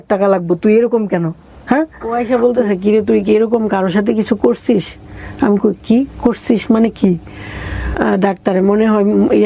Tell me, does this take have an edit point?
yes; 2 cuts; at 2.1 s, 7.9 s

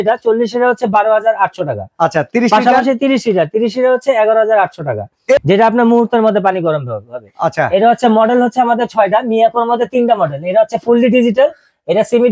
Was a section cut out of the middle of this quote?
yes; 1 cut; at 5.4 s

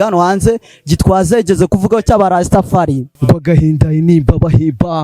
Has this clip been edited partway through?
yes; 1 cut; at 3.1 s

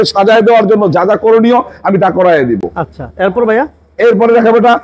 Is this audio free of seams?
yes; 0 cuts

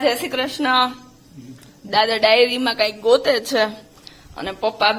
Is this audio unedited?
yes; 0 cuts

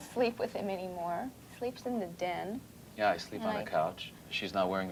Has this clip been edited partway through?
no; 0 cuts

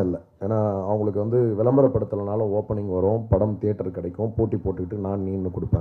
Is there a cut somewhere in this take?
no; 0 cuts

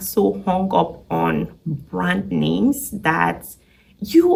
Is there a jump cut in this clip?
no; 0 cuts

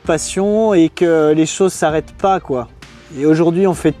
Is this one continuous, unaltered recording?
yes; 0 cuts

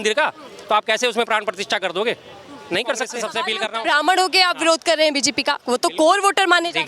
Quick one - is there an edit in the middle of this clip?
yes; 1 cut; at 3.3 s

